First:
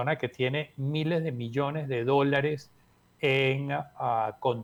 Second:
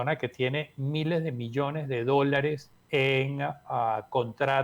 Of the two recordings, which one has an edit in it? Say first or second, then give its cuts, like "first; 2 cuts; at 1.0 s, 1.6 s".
second; 1 cut; at 2.7 s